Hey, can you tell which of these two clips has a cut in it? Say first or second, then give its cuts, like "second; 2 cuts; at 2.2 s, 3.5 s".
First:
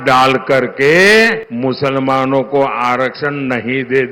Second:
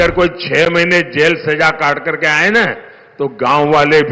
first; 1 cut; at 1.4 s